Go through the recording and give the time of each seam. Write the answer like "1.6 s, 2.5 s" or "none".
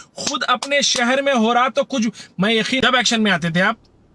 2.8 s